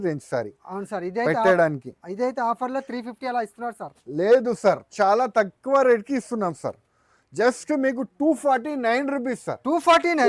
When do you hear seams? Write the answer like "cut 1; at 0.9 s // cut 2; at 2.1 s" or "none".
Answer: none